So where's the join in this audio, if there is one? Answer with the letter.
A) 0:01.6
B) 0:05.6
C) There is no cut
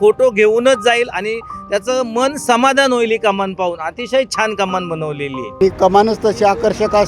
B